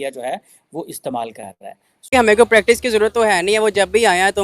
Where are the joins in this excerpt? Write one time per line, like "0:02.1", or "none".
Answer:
0:02.1